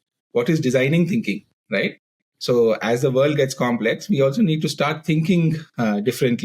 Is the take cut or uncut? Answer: uncut